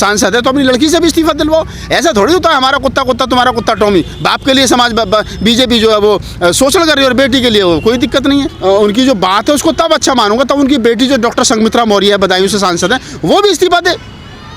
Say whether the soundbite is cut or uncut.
cut